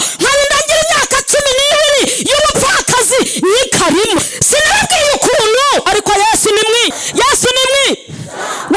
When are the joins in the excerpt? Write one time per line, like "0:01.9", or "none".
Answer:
0:04.2
0:05.9
0:07.0